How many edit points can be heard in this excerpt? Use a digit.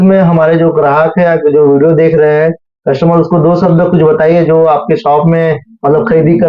0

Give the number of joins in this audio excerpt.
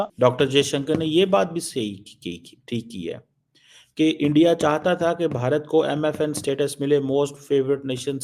0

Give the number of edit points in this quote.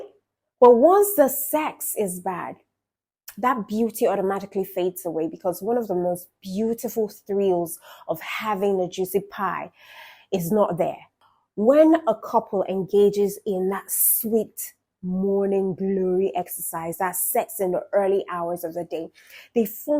1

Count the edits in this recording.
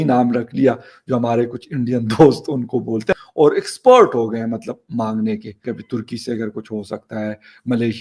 2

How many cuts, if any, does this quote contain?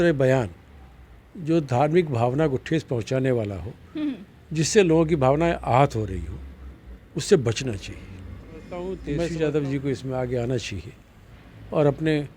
1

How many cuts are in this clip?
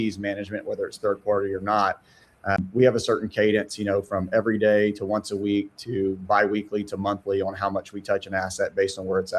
1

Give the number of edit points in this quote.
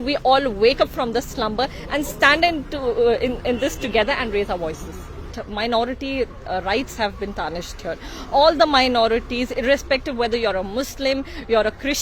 1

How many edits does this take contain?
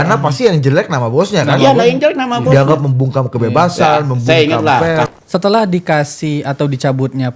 1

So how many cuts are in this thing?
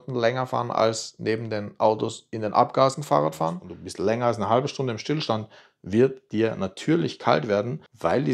1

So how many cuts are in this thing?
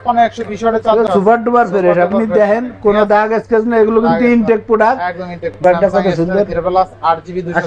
2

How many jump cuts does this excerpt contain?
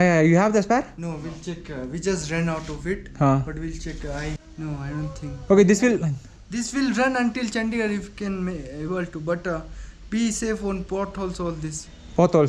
1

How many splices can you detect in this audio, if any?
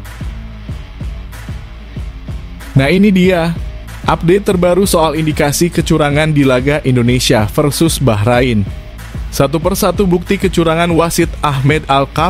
1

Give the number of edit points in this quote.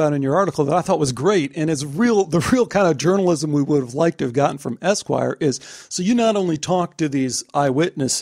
0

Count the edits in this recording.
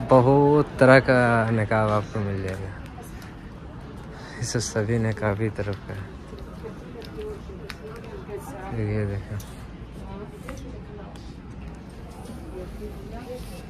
0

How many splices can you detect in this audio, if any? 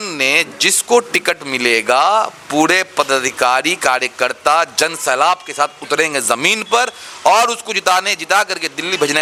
0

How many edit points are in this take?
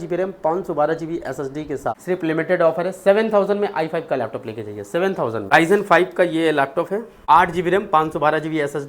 3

